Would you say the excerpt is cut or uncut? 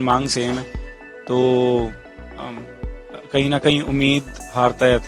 uncut